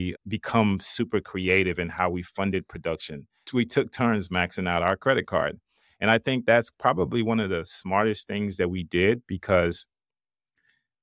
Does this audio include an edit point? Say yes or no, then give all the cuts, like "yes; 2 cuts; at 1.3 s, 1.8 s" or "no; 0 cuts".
yes; 2 cuts; at 3.4 s, 6.7 s